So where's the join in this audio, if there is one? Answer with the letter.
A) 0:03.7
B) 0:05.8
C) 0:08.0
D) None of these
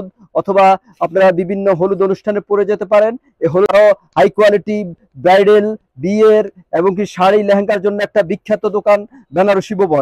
A